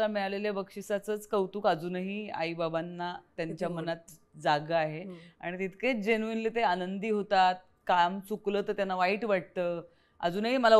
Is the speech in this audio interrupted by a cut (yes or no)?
no